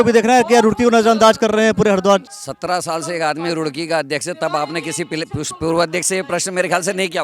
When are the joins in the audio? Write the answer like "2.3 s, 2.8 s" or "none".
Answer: 2.4 s